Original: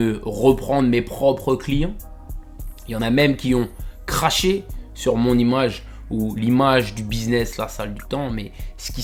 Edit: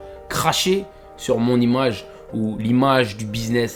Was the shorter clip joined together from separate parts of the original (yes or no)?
no